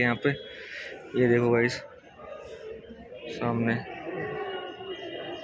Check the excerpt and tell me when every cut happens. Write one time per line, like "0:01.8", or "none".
none